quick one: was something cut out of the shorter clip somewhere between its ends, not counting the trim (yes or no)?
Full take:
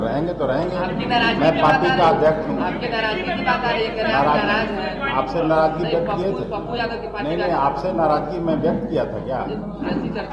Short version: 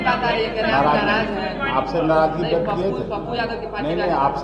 no